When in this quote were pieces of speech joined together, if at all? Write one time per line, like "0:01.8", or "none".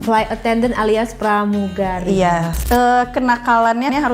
0:02.5